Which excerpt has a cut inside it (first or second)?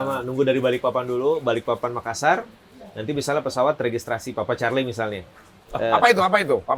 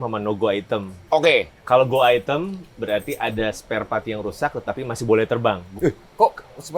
second